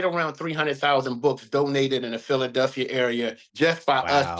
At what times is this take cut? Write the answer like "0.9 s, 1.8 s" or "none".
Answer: 3.4 s